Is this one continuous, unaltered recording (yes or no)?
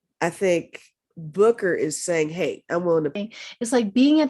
no